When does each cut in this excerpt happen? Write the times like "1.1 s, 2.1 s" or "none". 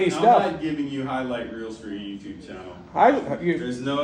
none